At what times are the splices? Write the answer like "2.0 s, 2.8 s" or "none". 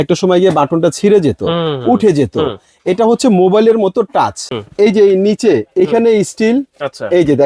4.5 s